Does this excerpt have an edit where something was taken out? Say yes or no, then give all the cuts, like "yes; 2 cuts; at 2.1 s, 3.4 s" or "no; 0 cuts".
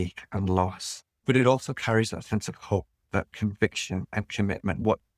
yes; 2 cuts; at 1.2 s, 3.1 s